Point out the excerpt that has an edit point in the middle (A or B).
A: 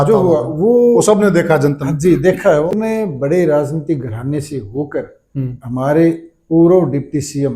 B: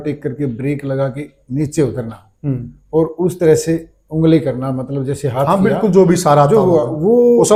A